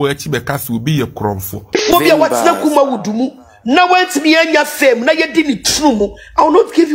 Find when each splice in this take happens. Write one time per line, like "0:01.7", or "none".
0:01.5